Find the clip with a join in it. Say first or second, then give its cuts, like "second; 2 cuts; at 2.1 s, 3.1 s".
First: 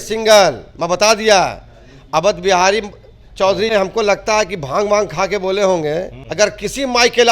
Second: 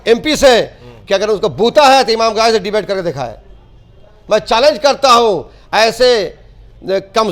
first; 2 cuts; at 3.7 s, 6.2 s